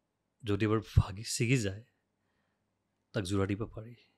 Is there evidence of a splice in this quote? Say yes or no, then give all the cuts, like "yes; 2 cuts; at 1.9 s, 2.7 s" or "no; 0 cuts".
no; 0 cuts